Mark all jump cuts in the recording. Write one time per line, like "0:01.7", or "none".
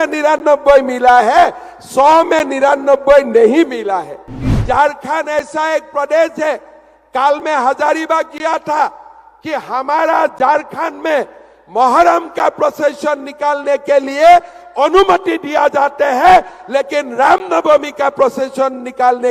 0:04.5

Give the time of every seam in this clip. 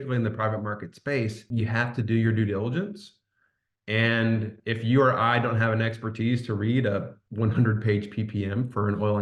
0:01.4
0:07.2

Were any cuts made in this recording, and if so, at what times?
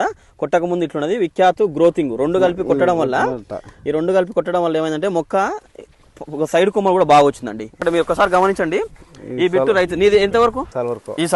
0:07.7

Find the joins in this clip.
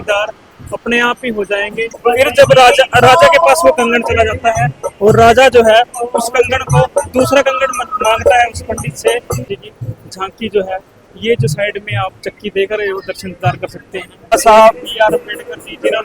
0:02.0
0:09.5
0:14.3

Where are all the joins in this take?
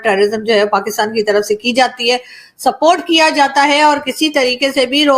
none

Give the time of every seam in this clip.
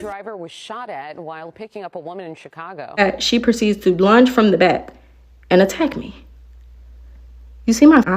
0:03.0

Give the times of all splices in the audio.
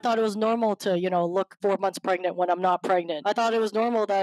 0:01.5
0:03.1

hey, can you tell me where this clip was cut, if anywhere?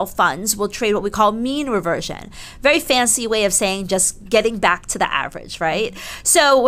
none

